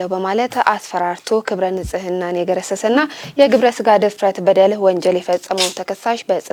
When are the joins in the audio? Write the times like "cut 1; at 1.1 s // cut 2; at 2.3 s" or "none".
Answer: none